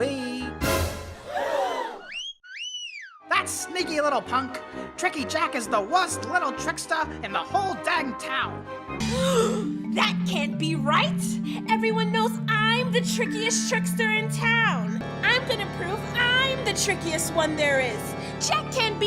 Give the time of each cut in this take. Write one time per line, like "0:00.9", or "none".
0:09.0
0:15.0